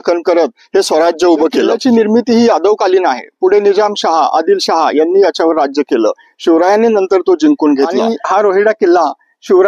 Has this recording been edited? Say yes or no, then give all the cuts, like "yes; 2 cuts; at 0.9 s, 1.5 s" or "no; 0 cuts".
yes; 2 cuts; at 1.7 s, 8.1 s